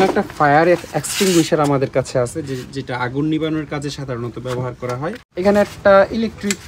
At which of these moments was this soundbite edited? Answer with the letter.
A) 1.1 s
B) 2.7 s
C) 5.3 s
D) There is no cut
C